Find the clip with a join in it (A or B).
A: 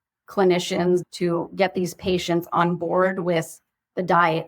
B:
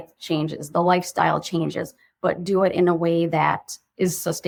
A